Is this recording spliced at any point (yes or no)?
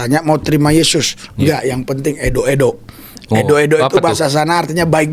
no